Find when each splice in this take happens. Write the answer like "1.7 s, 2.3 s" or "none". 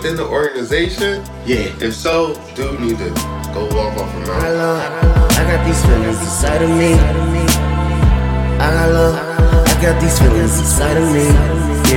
4.4 s